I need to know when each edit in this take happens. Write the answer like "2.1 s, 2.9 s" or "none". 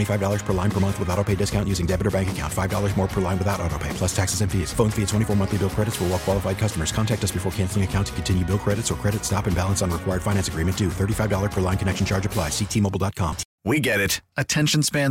13.5 s